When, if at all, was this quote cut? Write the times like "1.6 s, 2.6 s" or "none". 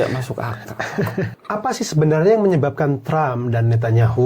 1.3 s